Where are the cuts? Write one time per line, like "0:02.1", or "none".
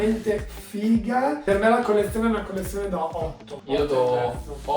0:01.4
0:03.5